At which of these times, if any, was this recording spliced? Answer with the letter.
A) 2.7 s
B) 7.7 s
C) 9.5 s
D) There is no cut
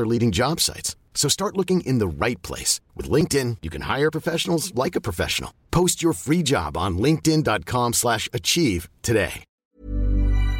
C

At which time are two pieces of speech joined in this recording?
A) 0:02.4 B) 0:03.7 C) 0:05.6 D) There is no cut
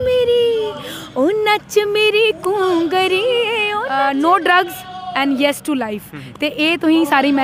B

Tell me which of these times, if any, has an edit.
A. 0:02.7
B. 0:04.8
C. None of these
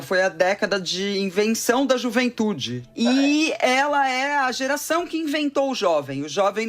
A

